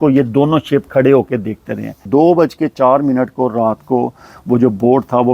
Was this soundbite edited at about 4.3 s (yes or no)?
no